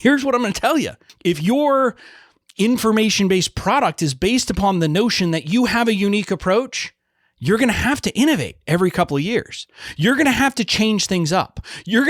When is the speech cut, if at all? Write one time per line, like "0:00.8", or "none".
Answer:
0:01.0